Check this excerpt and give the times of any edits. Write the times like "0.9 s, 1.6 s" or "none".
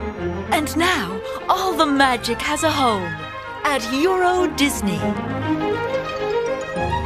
3.7 s